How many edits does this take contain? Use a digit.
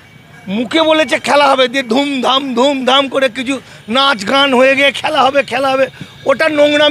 0